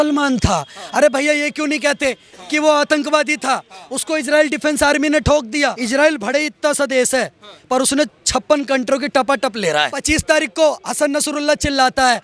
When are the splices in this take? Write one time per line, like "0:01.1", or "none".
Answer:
0:05.8
0:10.0